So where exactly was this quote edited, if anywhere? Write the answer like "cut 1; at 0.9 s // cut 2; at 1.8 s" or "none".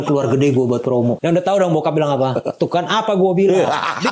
cut 1; at 1.2 s